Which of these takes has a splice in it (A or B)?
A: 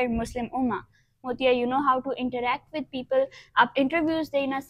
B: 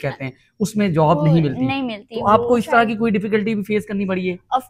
A